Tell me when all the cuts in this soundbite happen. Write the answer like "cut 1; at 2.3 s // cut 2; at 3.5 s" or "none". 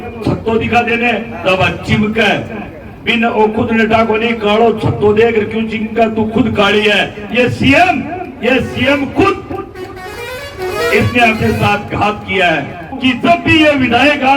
cut 1; at 12.9 s